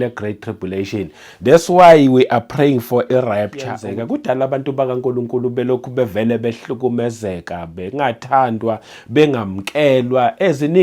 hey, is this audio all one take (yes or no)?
no